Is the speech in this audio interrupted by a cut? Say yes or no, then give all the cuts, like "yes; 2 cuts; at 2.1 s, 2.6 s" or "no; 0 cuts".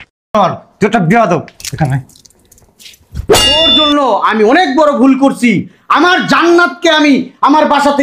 yes; 1 cut; at 3.5 s